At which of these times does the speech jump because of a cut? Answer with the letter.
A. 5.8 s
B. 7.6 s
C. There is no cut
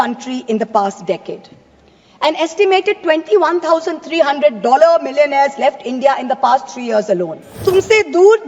B